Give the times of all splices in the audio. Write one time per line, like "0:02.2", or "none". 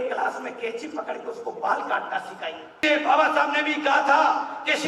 0:02.8